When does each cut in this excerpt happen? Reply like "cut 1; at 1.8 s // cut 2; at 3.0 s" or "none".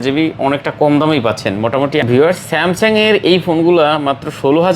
cut 1; at 2.1 s